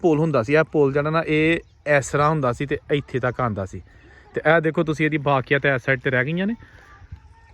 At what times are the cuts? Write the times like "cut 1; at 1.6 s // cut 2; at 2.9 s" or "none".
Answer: none

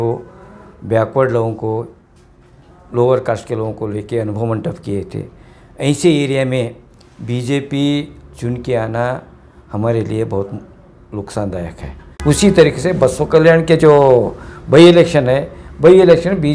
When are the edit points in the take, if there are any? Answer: cut 1; at 12.1 s

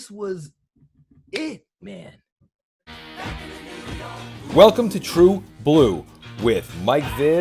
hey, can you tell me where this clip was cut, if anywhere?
cut 1; at 2.9 s

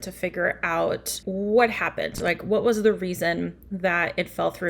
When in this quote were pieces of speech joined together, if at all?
cut 1; at 1.2 s

